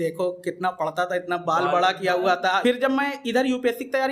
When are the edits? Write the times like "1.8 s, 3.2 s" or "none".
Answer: 2.6 s